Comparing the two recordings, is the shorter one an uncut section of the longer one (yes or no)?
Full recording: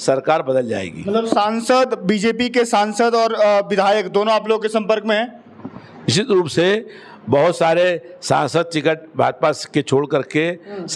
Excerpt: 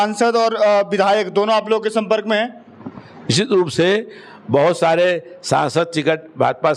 yes